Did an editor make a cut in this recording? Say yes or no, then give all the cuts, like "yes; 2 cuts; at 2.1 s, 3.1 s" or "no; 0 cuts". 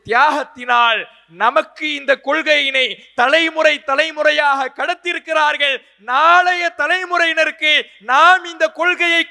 no; 0 cuts